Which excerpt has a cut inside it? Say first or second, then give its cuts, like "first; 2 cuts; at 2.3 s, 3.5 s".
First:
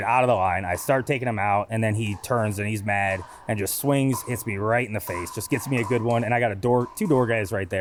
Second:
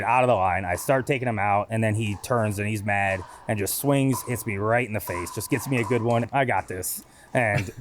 second; 1 cut; at 6.2 s